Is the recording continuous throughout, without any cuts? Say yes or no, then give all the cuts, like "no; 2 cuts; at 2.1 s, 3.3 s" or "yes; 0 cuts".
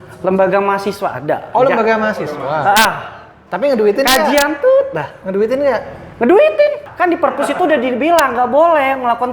no; 1 cut; at 6.9 s